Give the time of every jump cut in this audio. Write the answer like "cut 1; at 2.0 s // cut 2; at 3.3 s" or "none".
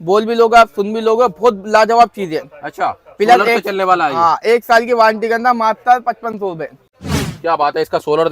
cut 1; at 6.9 s